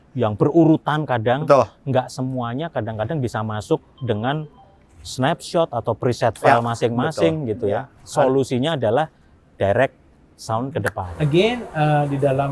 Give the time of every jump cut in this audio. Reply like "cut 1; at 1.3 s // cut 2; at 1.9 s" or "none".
cut 1; at 11.1 s